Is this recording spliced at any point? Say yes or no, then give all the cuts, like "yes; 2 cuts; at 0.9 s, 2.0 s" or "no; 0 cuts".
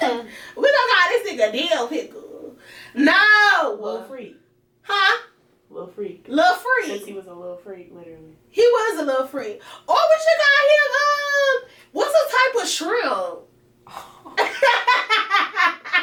no; 0 cuts